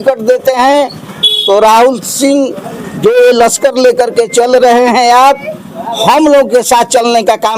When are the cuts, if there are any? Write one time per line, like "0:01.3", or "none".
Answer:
none